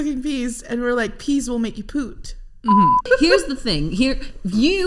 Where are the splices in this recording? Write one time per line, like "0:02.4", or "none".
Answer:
0:03.0